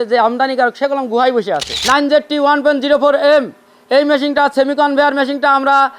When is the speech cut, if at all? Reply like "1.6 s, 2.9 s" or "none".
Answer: 1.7 s